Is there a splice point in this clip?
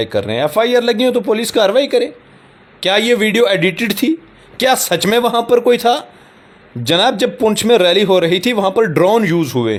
no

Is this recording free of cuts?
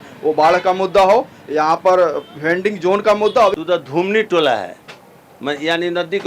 no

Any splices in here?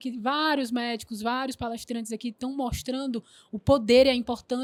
no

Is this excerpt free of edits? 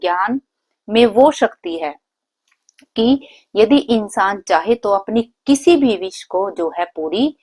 yes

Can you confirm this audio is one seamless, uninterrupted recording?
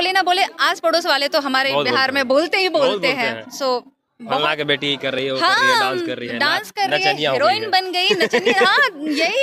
yes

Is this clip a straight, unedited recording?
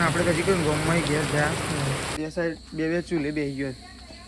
no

